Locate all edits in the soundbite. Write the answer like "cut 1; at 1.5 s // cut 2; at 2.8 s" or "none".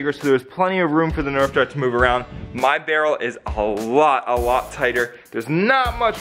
none